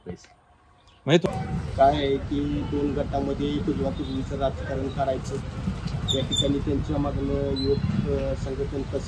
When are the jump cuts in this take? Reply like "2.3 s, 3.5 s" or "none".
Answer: 1.2 s